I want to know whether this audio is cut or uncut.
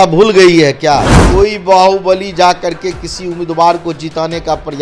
cut